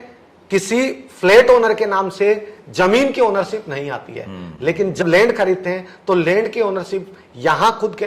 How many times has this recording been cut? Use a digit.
1